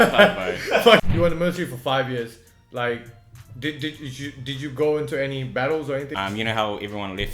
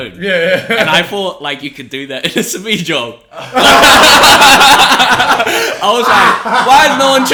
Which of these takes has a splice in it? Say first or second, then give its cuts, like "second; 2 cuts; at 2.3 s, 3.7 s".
first; 2 cuts; at 1.0 s, 6.1 s